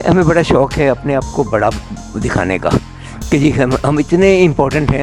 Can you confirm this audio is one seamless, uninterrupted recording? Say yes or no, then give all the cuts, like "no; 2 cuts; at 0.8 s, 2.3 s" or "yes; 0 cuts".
yes; 0 cuts